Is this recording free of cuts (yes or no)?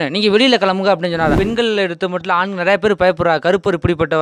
no